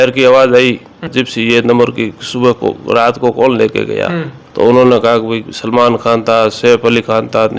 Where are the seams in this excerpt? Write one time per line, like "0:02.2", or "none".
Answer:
0:01.1